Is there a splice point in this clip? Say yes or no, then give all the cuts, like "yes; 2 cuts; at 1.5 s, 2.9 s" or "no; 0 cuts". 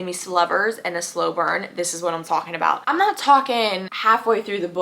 yes; 2 cuts; at 2.8 s, 3.9 s